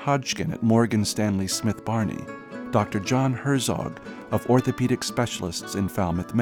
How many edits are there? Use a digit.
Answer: 0